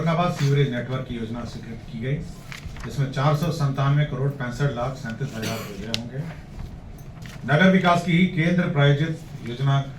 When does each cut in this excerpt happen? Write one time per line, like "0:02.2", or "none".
0:07.2